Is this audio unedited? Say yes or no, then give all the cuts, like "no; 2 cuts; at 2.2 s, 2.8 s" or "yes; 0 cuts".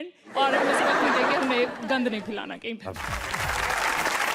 no; 1 cut; at 3.0 s